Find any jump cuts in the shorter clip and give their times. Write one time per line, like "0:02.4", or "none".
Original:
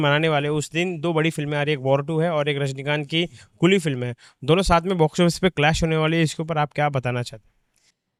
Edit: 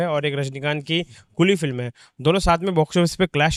none